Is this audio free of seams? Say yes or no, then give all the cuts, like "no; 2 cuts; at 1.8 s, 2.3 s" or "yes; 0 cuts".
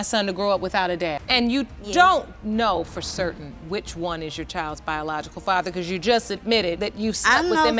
yes; 0 cuts